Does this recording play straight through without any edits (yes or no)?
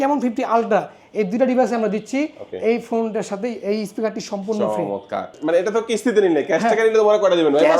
no